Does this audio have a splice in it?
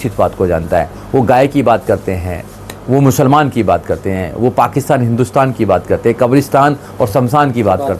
no; 0 cuts

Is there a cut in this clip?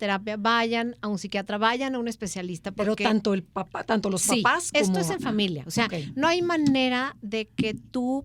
no; 0 cuts

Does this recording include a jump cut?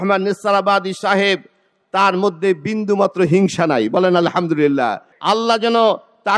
yes; 1 cut; at 5.1 s

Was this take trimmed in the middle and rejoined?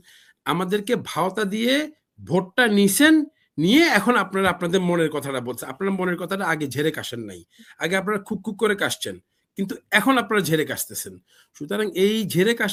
no; 0 cuts

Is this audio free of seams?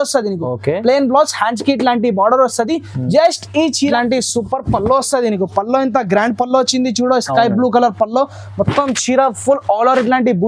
no; 1 cut; at 3.9 s

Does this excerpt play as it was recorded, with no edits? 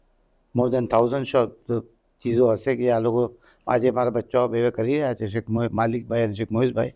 yes; 0 cuts

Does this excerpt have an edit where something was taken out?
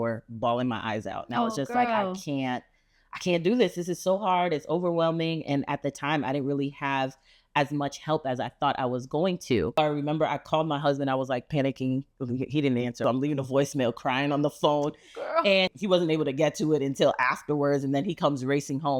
no; 0 cuts

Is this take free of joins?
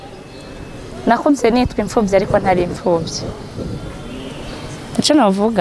yes; 0 cuts

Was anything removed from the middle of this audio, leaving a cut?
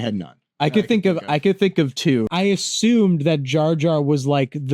yes; 1 cut; at 2.3 s

